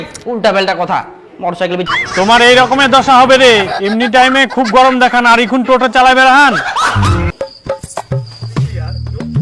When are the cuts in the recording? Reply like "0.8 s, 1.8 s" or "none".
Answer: 1.9 s, 7.0 s, 8.4 s